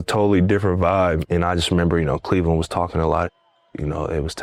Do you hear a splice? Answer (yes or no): yes